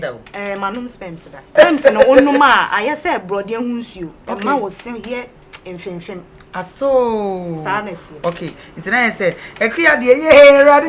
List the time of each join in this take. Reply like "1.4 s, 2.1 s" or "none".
1.5 s

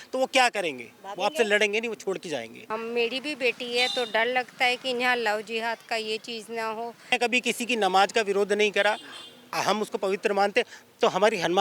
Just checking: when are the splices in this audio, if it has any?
2.6 s, 7.1 s

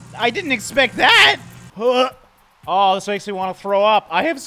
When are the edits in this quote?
1.5 s

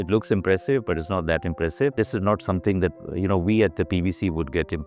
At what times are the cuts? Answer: 1.9 s

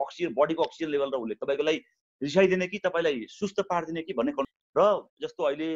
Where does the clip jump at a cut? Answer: 4.6 s

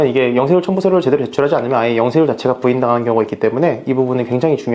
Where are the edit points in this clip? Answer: none

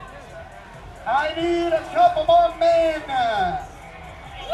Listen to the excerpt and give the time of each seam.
none

